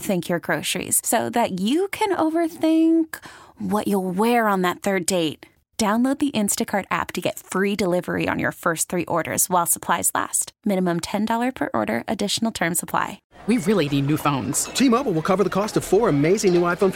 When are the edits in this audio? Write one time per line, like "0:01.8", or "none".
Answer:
0:13.2